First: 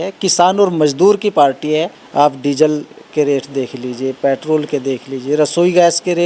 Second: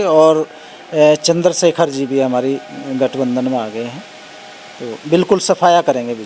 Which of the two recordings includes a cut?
first; 1 cut; at 2.0 s

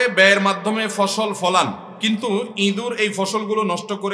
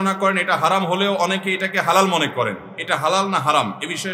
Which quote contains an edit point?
first; 1 cut; at 1.9 s

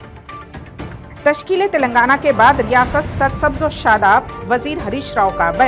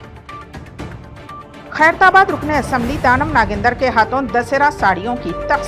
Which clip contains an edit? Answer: second; 1 cut; at 1.0 s

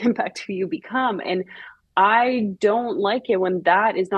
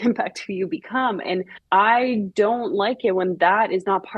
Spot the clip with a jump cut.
second; 1 cut; at 1.6 s

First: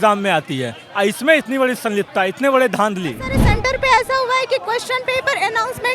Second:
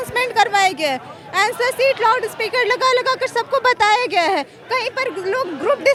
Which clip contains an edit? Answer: first; 1 cut; at 3.4 s

